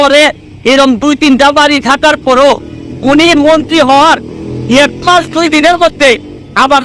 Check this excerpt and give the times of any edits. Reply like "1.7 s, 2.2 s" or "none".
none